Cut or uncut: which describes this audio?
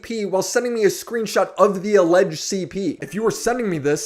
cut